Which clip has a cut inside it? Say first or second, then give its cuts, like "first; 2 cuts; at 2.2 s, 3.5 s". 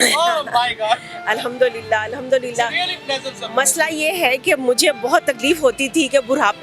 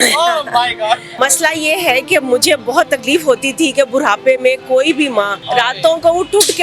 second; 2 cuts; at 1.1 s, 5.4 s